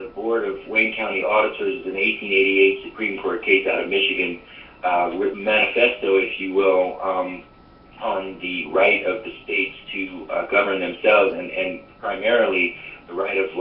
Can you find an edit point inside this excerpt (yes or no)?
no